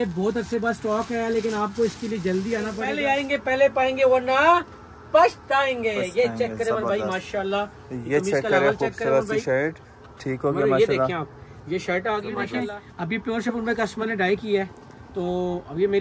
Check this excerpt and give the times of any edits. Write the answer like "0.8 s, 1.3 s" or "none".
2.9 s, 12.6 s